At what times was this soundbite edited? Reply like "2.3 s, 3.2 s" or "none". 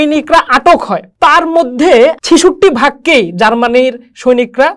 1.0 s, 2.2 s